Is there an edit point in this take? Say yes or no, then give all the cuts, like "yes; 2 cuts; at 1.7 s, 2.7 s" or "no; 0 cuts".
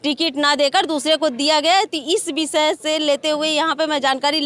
no; 0 cuts